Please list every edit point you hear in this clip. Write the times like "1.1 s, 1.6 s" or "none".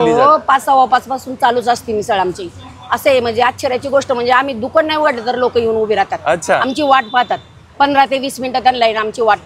none